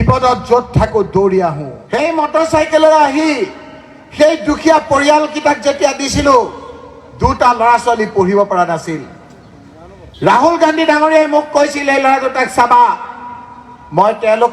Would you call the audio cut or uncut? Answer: cut